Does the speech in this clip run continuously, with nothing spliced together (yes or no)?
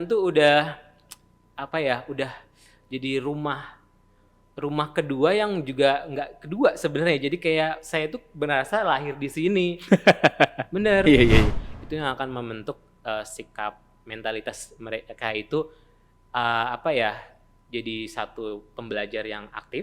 no